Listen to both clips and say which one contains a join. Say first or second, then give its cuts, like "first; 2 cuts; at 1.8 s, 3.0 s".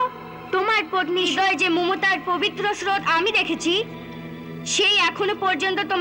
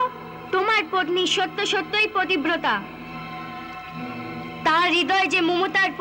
first; 1 cut; at 1.3 s